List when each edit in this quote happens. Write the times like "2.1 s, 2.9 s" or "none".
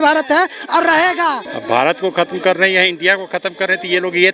1.5 s